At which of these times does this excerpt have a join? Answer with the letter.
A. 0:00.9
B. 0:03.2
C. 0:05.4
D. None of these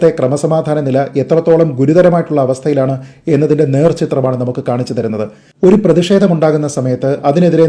C